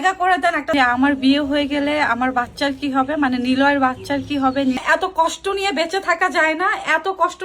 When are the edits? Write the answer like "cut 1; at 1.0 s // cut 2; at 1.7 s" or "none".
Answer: cut 1; at 0.7 s // cut 2; at 4.8 s